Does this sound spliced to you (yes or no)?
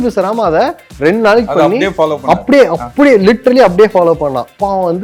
no